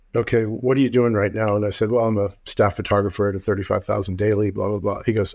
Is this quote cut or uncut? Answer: uncut